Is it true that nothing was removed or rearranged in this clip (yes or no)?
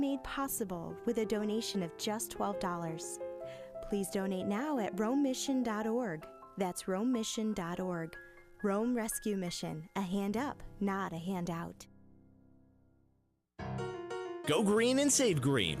no